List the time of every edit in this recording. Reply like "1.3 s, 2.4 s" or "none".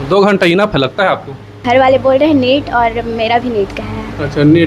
1.6 s